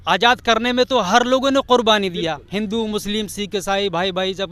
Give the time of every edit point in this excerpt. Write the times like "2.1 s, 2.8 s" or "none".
none